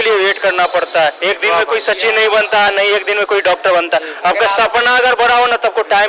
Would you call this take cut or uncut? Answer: uncut